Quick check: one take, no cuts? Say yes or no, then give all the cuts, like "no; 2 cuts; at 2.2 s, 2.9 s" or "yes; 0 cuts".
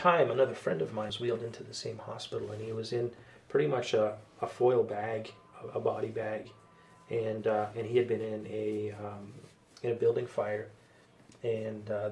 no; 1 cut; at 1.1 s